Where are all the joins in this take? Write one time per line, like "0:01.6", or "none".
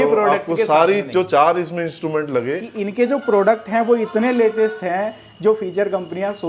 0:02.8